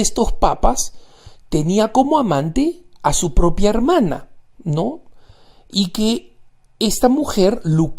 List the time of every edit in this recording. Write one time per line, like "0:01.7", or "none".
0:06.5